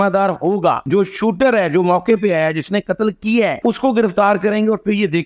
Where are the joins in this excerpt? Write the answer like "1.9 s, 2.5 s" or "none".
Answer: none